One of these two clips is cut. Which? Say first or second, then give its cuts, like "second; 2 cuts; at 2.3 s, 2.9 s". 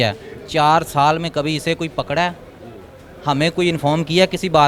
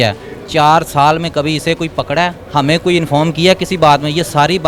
second; 1 cut; at 2.4 s